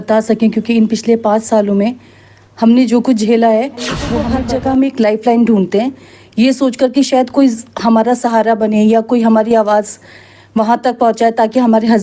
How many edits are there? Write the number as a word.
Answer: one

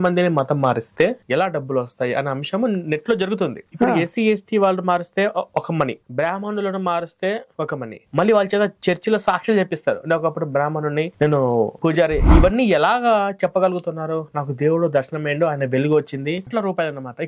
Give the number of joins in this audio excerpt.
three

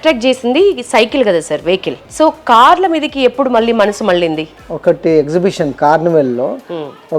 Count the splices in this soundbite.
two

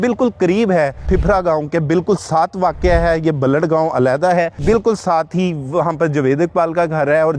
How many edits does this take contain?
two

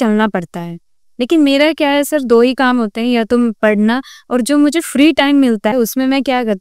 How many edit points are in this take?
one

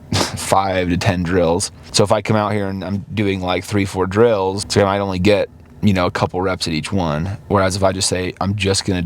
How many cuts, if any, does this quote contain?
two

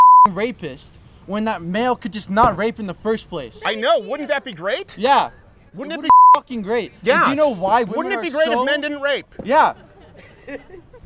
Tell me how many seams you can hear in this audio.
zero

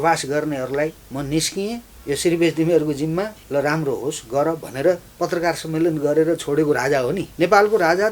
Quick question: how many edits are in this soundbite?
four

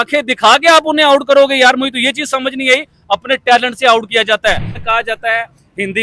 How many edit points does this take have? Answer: one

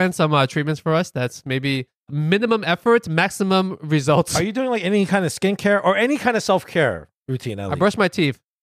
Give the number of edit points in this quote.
one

